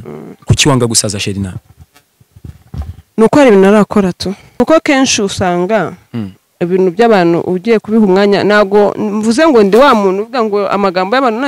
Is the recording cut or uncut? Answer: cut